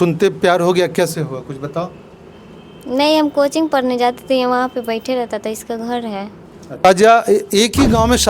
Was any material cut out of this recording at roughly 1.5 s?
no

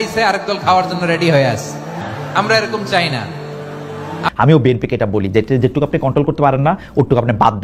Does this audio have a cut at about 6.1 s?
no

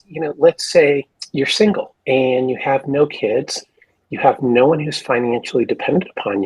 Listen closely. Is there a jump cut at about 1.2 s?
yes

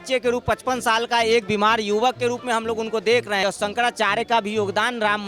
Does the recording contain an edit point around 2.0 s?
no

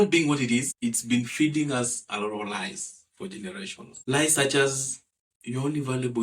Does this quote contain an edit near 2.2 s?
no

